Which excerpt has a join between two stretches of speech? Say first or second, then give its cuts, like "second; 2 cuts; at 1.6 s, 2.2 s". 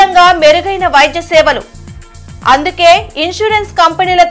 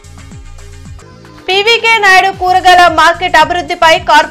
second; 1 cut; at 1.2 s